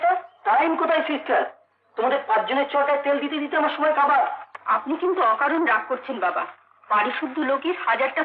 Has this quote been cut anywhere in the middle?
yes; 1 cut; at 4.5 s

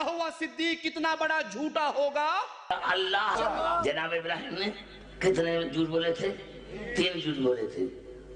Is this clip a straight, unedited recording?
no; 1 cut; at 3.3 s

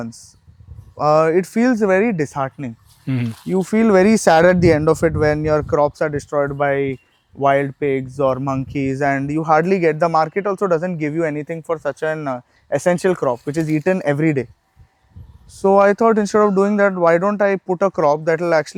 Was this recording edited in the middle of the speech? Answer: no; 0 cuts

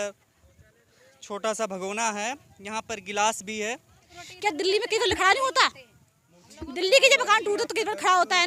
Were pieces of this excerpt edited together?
yes; 1 cut; at 4.2 s

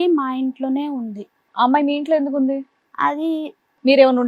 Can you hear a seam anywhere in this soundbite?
no; 0 cuts

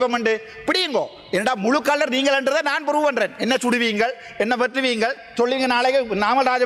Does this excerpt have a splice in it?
no; 0 cuts

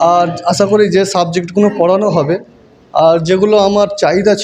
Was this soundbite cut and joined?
no; 0 cuts

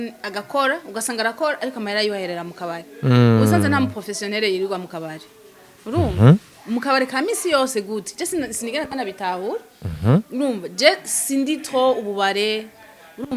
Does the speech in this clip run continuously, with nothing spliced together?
yes; 0 cuts

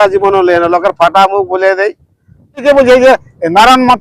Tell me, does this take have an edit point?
yes; 1 cut; at 2.6 s

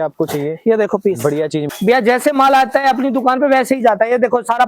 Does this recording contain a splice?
yes; 1 cut; at 1.7 s

